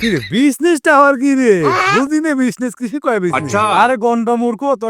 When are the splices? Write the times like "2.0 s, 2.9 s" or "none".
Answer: none